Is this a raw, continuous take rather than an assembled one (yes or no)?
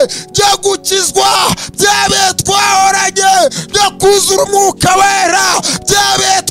yes